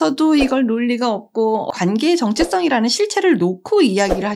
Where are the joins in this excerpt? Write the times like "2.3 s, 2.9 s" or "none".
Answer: 1.7 s